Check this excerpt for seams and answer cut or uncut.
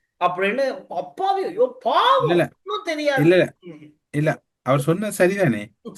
uncut